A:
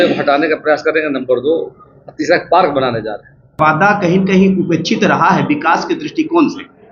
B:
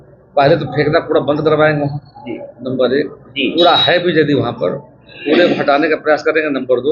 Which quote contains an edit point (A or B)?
A